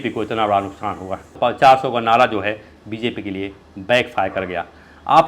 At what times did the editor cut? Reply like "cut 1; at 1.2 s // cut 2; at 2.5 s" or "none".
cut 1; at 1.3 s